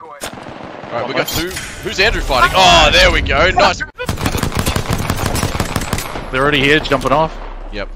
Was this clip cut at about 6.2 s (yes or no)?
no